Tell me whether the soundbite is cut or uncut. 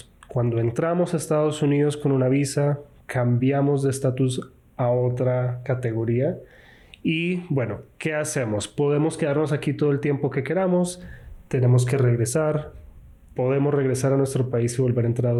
uncut